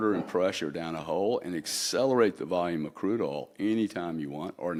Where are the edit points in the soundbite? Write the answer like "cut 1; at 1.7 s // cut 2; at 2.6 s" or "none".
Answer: none

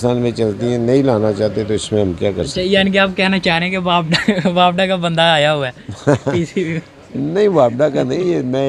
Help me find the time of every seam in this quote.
none

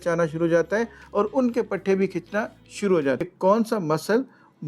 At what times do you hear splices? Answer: cut 1; at 3.2 s

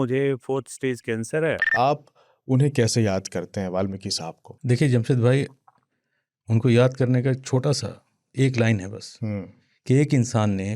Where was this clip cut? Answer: cut 1; at 1.7 s // cut 2; at 4.5 s

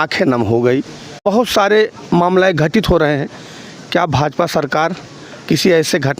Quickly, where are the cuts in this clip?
cut 1; at 1.2 s

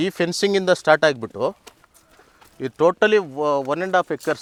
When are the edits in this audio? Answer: none

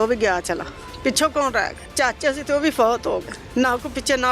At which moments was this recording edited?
cut 1; at 1.8 s // cut 2; at 3.4 s

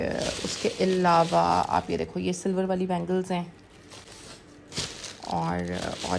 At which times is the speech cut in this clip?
none

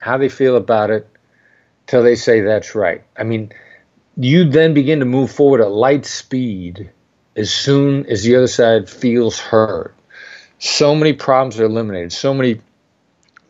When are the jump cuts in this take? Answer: none

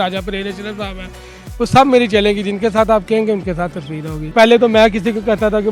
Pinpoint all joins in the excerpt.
cut 1; at 4.3 s

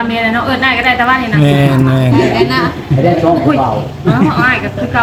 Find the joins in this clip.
none

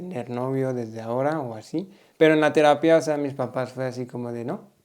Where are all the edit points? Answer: cut 1; at 2.0 s

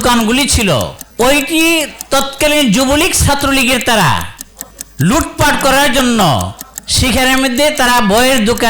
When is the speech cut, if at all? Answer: cut 1; at 1.0 s

